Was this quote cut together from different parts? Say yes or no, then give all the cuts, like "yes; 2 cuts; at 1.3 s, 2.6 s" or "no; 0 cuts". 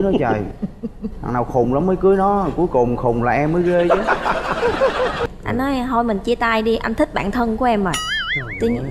yes; 1 cut; at 5.3 s